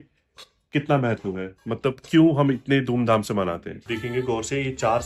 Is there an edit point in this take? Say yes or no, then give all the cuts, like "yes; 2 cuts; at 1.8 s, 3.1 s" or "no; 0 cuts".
yes; 1 cut; at 3.8 s